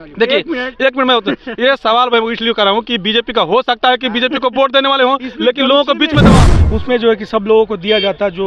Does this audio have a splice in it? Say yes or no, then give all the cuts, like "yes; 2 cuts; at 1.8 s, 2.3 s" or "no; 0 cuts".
yes; 1 cut; at 6.4 s